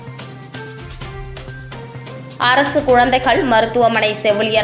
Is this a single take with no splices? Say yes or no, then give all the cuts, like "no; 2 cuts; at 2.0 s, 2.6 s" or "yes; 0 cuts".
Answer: no; 1 cut; at 1.8 s